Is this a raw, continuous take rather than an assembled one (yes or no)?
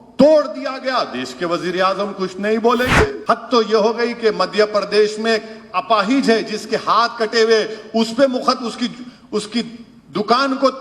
no